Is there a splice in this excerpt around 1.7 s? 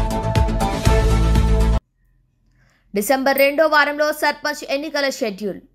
yes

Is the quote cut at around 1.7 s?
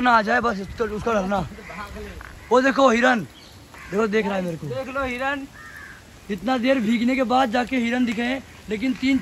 no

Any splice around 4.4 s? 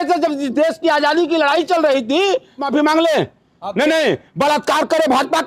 no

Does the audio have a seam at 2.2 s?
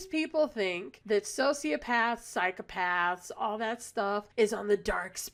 no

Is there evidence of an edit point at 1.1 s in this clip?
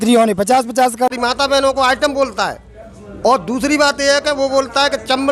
yes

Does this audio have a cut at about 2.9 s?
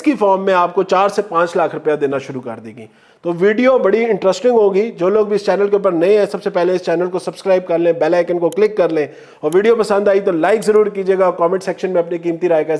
no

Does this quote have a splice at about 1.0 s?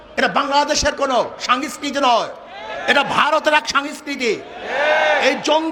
no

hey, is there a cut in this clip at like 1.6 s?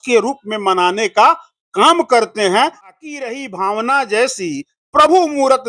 no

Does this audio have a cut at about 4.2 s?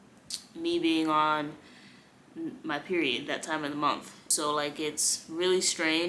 yes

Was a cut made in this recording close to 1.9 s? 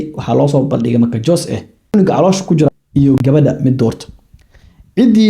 yes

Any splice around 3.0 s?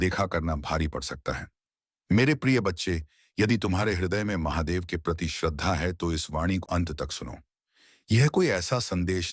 no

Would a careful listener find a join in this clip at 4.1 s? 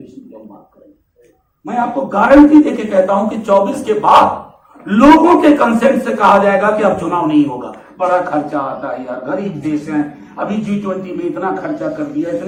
no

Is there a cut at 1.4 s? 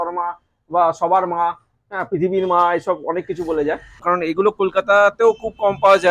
no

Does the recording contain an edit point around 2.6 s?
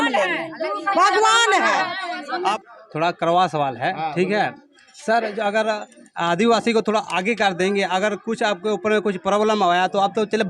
yes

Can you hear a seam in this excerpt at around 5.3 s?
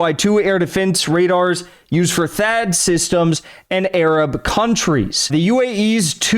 yes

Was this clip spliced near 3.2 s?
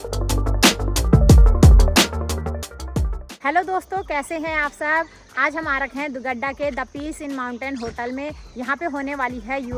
no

